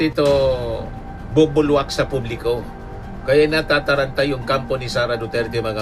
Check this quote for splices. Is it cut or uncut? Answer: uncut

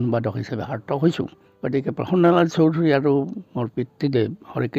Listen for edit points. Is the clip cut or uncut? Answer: cut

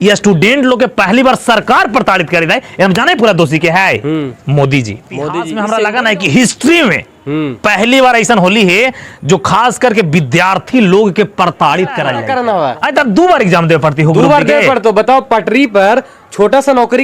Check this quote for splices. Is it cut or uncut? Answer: cut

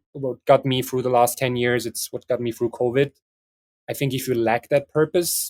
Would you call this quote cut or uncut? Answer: uncut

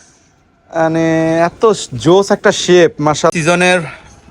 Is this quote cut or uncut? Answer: cut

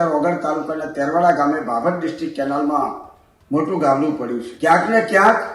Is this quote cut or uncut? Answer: cut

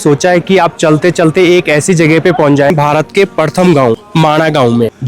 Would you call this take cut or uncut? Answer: cut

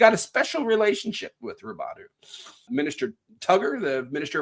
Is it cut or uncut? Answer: cut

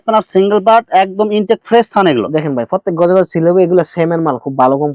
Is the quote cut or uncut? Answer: uncut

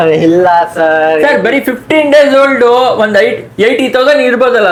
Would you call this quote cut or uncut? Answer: uncut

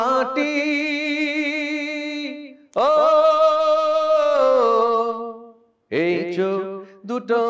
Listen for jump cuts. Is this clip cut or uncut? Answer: uncut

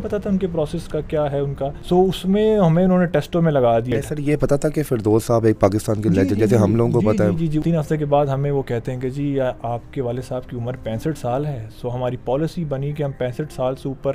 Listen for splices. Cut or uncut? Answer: cut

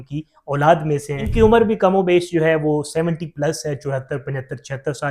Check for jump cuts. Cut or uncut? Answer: cut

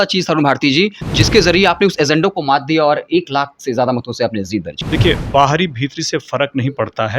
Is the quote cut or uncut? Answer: cut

